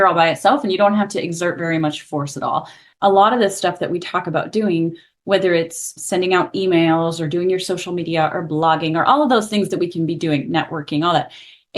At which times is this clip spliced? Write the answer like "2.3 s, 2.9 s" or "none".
2.8 s